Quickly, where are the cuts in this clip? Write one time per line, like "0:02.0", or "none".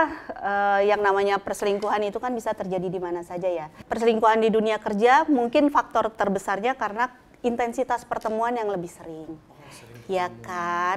0:03.8